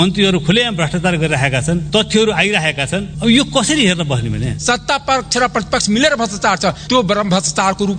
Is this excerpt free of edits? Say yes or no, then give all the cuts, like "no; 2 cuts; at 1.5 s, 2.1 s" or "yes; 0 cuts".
no; 3 cuts; at 1.8 s, 3.1 s, 4.5 s